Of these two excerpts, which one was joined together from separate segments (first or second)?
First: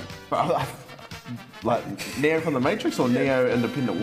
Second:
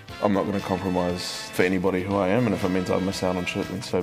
second